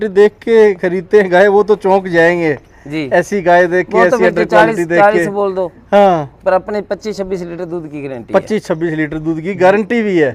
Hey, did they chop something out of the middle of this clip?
no; 0 cuts

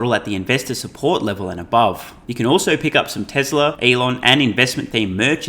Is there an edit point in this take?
yes; 2 cuts; at 2.2 s, 3.8 s

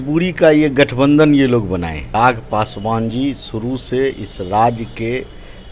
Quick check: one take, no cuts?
no; 1 cut; at 2.0 s

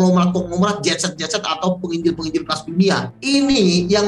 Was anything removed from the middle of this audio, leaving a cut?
yes; 1 cut; at 3.1 s

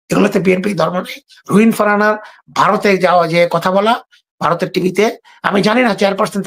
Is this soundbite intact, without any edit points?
yes; 0 cuts

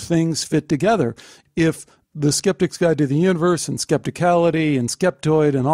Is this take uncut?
no; 1 cut; at 1.4 s

